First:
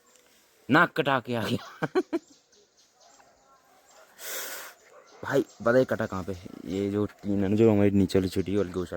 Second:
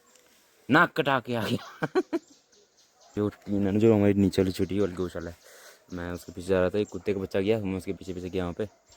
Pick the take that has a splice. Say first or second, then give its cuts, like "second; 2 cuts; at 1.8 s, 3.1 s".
second; 1 cut; at 3.1 s